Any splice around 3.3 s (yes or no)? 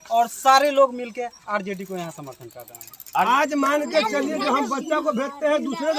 yes